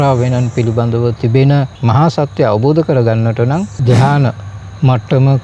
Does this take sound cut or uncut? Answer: cut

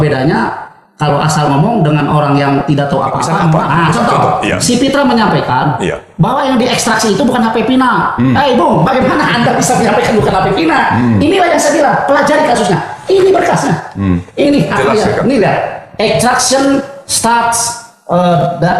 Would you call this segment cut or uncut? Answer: cut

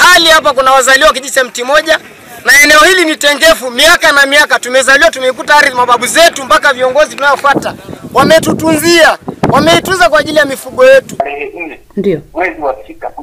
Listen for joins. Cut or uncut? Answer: cut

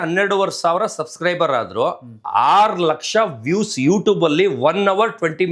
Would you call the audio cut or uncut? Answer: uncut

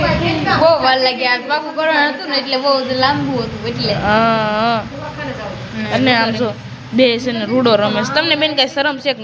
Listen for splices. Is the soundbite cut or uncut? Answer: uncut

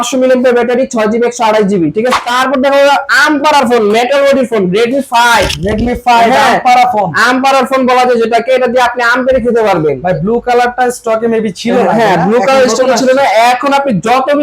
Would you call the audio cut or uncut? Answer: cut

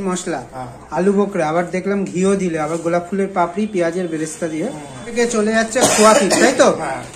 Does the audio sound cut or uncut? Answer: cut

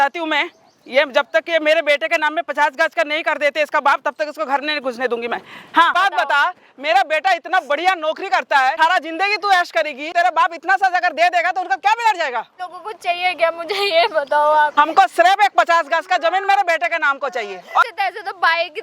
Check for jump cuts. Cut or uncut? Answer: cut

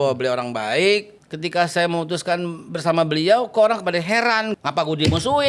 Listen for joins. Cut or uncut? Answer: cut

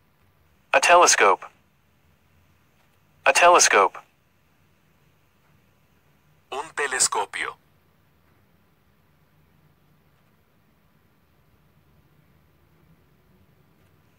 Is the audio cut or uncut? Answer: uncut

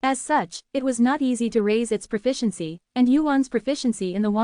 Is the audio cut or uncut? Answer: cut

